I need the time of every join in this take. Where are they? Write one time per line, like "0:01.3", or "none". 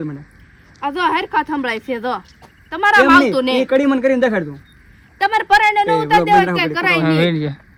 none